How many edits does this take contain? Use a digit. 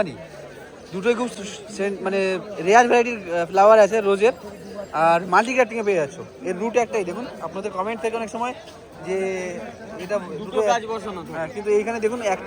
0